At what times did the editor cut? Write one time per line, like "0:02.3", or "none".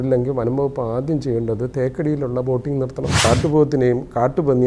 0:03.2